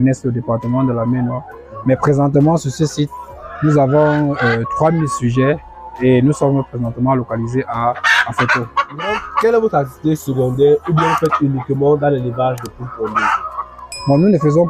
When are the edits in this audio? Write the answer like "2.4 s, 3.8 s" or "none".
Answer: none